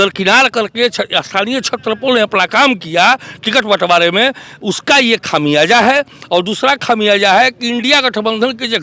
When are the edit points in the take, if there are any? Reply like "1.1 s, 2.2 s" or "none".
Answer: none

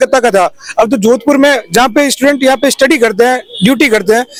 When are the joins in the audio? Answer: none

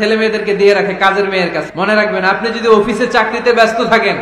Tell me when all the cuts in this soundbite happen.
1.6 s

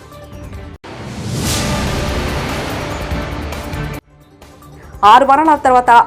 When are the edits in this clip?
0.8 s, 4.1 s

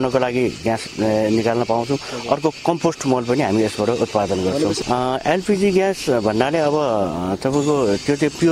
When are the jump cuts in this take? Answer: 4.8 s

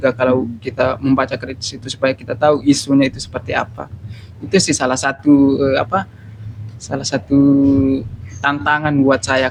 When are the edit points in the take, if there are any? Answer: none

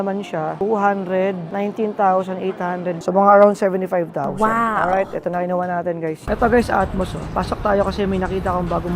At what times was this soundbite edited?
3.0 s, 6.2 s

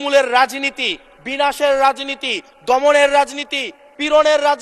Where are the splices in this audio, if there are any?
none

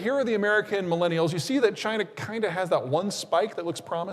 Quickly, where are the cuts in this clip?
none

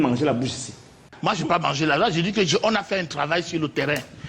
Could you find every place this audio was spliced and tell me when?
1.1 s

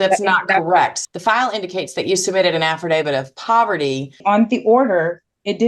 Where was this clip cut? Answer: 1.0 s, 4.2 s

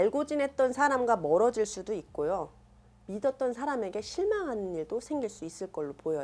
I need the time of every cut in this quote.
none

